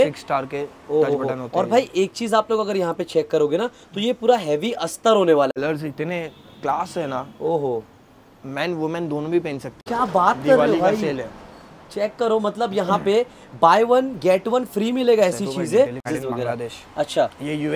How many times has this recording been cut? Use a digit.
3